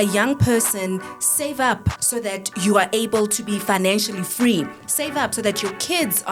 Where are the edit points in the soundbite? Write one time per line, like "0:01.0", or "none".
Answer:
none